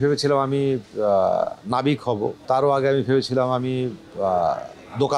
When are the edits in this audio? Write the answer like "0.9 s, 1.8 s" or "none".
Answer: 2.4 s